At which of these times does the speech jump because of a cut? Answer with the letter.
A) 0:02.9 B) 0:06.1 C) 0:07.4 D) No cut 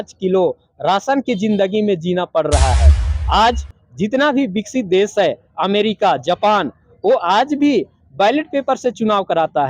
A